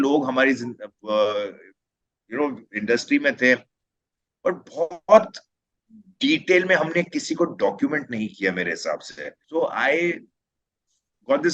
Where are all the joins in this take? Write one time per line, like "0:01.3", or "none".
0:09.3